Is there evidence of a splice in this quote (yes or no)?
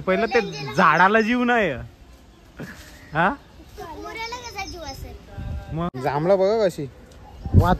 yes